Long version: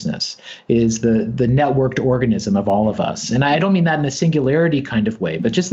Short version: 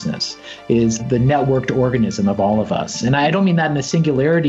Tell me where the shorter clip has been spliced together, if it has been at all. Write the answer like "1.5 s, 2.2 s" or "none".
1.0 s